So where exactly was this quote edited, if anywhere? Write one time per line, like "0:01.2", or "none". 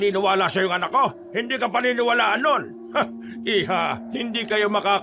0:01.3
0:02.8
0:04.0